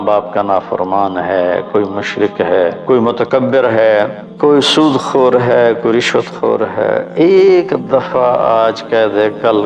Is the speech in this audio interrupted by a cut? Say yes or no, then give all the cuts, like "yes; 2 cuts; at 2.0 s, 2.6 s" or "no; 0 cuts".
yes; 3 cuts; at 2.8 s, 4.2 s, 7.1 s